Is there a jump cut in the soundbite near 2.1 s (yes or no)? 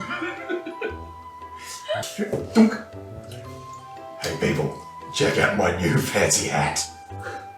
yes